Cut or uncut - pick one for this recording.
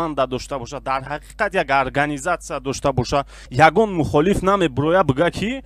cut